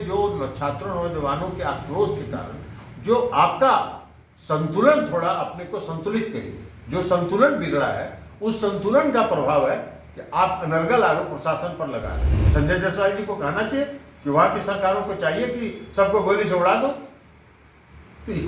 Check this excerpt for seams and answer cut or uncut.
cut